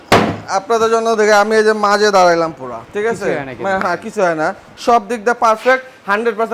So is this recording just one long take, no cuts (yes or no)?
yes